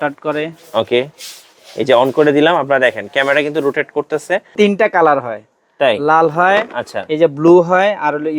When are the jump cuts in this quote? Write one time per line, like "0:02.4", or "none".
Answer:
0:04.5